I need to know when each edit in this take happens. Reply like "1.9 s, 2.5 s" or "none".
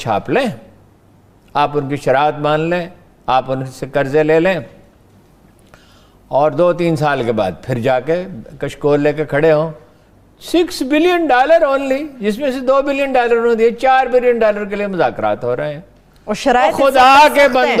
none